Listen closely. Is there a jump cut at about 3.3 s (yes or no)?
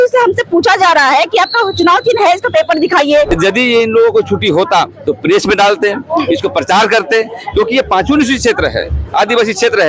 yes